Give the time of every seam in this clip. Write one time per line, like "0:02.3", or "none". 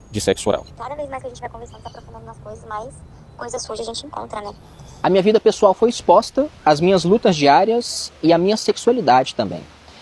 0:05.1